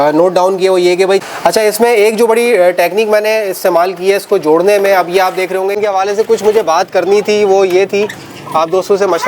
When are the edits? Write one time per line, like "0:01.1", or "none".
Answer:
0:01.2
0:05.7